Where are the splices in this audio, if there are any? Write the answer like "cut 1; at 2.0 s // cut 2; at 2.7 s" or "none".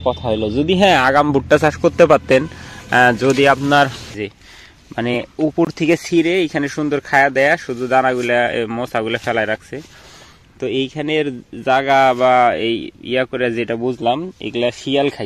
cut 1; at 4.1 s